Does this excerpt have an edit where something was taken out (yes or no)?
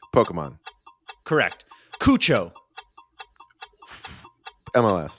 no